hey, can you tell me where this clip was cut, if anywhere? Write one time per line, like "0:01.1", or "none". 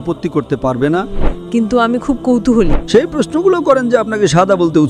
0:01.3
0:02.7